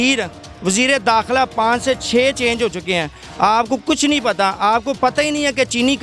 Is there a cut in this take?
no; 0 cuts

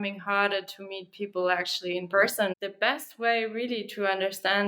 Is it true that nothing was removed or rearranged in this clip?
no; 1 cut; at 2.5 s

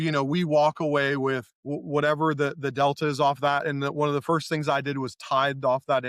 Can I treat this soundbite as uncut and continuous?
yes; 0 cuts

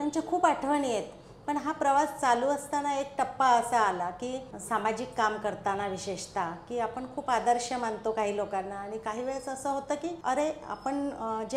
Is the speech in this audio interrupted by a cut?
yes; 2 cuts; at 4.5 s, 10.2 s

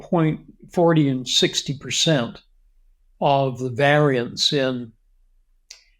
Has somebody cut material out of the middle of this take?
no; 0 cuts

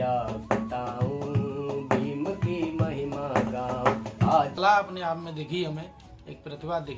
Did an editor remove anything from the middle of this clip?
yes; 1 cut; at 4.6 s

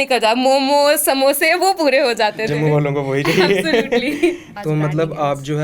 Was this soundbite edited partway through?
yes; 1 cut; at 4.5 s

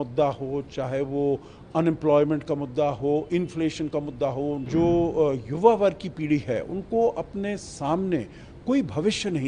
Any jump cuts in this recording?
yes; 1 cut; at 4.6 s

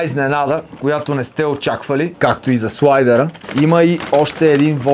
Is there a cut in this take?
yes; 2 cuts; at 2.1 s, 3.4 s

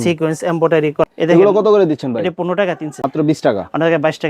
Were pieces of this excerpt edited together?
yes; 2 cuts; at 1.1 s, 2.9 s

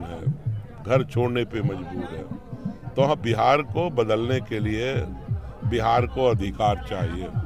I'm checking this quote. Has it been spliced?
no; 0 cuts

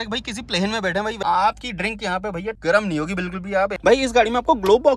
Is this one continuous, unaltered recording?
no; 2 cuts; at 1.2 s, 3.8 s

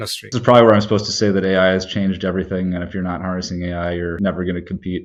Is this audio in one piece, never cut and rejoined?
yes; 0 cuts

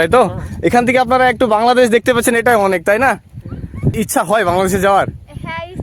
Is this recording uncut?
no; 1 cut; at 3.9 s

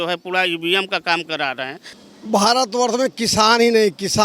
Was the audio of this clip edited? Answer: yes; 1 cut; at 1.9 s

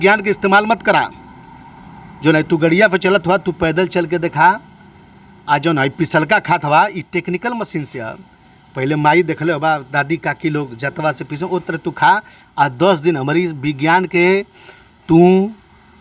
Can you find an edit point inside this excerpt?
no; 0 cuts

